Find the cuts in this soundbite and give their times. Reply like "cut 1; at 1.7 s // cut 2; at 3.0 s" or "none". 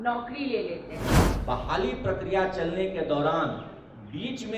cut 1; at 1.3 s